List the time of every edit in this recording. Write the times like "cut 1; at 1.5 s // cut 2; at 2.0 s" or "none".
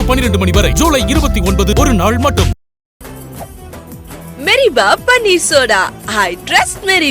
none